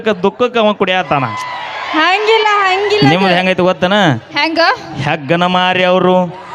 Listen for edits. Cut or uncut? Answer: cut